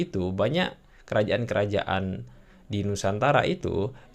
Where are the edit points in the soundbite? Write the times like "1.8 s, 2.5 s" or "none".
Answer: none